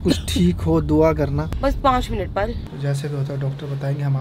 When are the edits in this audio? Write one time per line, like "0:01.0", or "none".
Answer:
0:01.5
0:02.6